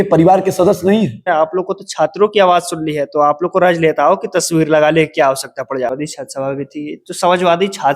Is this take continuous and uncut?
no; 2 cuts; at 1.3 s, 5.9 s

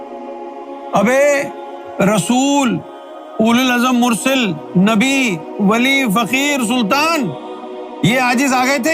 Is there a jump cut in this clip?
yes; 1 cut; at 0.9 s

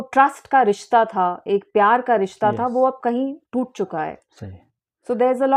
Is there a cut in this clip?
no; 0 cuts

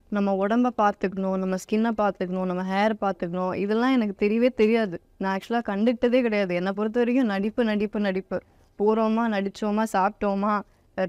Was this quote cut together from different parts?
no; 0 cuts

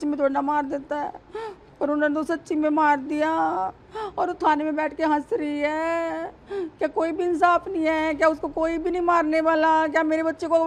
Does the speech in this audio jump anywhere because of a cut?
no; 0 cuts

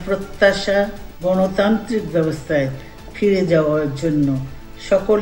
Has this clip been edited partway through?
yes; 1 cut; at 1.0 s

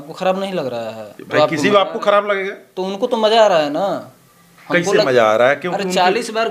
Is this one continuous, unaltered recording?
yes; 0 cuts

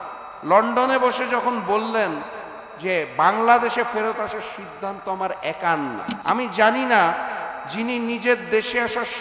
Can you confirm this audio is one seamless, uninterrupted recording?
no; 1 cut; at 6.1 s

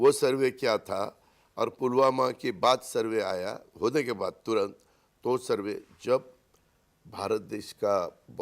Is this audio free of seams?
no; 1 cut; at 3.2 s

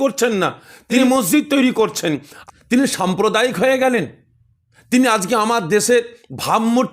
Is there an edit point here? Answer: yes; 2 cuts; at 1.0 s, 2.3 s

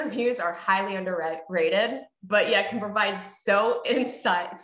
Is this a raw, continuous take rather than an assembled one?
yes; 0 cuts

